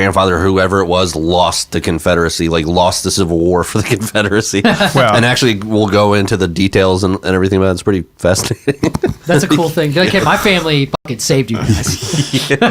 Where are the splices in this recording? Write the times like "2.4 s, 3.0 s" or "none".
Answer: 9.2 s